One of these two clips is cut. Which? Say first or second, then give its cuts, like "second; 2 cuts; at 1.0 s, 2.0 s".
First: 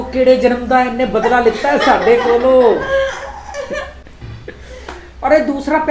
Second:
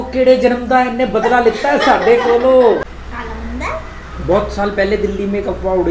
second; 1 cut; at 2.8 s